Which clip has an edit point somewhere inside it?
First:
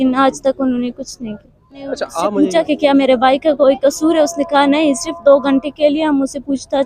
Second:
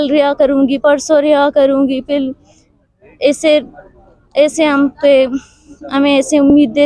first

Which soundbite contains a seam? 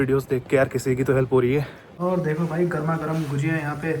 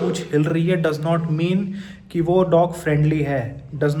first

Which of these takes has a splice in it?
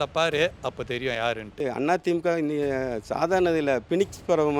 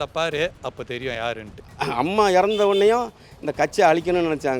second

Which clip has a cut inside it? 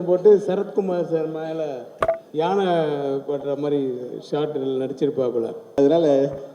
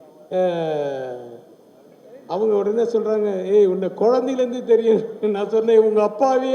first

